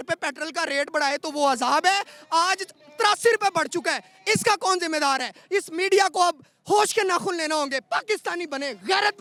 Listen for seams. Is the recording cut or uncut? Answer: uncut